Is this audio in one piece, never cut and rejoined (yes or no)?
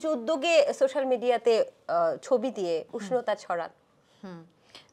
yes